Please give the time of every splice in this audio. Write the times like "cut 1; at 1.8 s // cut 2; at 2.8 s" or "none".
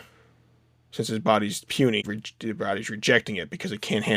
cut 1; at 2.1 s